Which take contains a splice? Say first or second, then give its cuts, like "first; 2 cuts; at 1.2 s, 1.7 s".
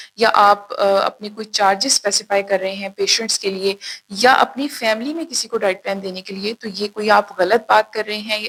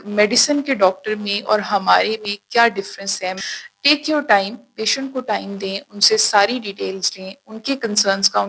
second; 1 cut; at 3.4 s